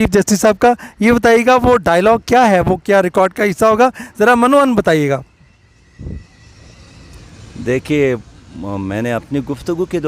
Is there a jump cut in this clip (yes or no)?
no